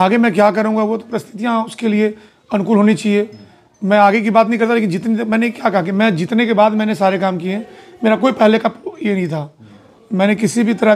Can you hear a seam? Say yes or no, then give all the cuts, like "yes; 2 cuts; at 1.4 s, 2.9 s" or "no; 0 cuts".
no; 0 cuts